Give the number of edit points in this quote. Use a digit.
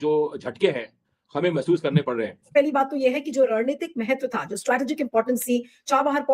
1